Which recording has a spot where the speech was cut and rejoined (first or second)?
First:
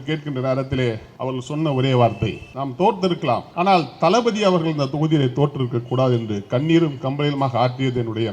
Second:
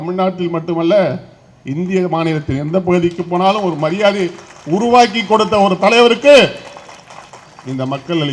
first